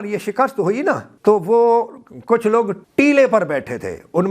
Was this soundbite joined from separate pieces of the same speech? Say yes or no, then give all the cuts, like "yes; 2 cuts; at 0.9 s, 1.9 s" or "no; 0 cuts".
yes; 2 cuts; at 1.1 s, 2.8 s